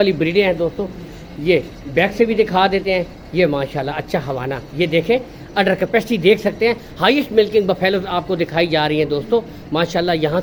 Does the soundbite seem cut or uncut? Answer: uncut